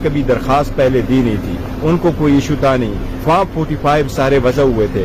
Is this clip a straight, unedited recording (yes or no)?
yes